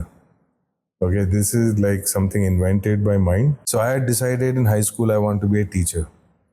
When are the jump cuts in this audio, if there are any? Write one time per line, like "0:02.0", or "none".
0:03.6